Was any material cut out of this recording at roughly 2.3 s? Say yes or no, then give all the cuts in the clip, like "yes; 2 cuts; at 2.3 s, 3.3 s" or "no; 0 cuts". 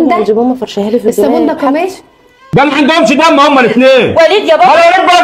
yes; 1 cut; at 2.3 s